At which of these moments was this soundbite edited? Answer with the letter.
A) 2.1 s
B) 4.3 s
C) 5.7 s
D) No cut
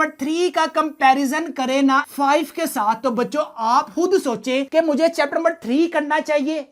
A